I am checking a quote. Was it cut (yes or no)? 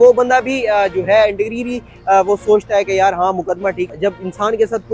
yes